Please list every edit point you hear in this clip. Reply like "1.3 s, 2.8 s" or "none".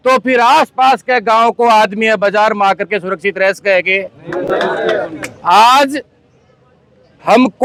none